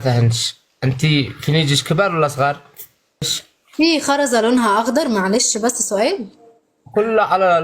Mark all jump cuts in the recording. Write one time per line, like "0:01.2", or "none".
0:03.4